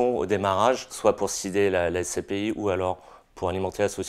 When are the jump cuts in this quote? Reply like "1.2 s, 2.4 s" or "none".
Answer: 0.9 s